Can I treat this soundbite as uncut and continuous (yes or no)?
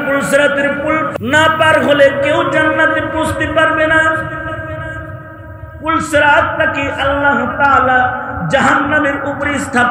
no